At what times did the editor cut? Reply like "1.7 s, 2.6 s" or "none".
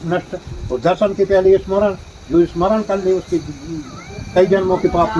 none